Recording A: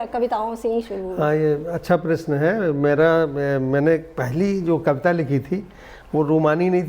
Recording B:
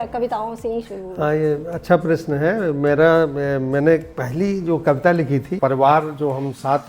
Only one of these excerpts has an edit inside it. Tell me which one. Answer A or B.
B